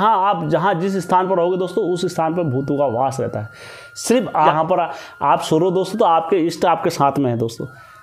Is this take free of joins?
no; 1 cut; at 4.5 s

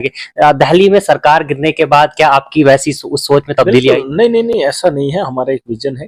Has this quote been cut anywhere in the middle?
no; 0 cuts

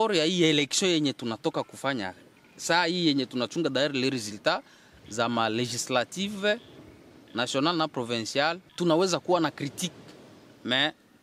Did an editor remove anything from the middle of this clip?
yes; 1 cut; at 8.7 s

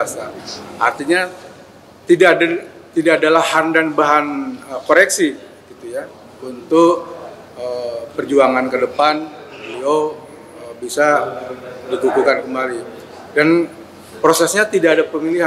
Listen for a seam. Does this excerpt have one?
no; 0 cuts

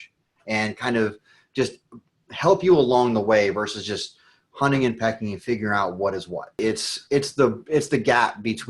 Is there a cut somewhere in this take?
yes; 1 cut; at 6.6 s

